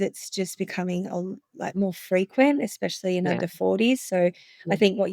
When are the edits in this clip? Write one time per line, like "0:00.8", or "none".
none